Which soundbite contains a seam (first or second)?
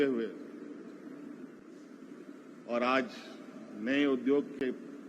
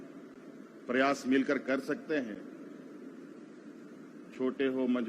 first